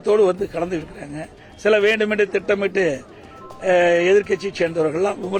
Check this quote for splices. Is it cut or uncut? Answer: uncut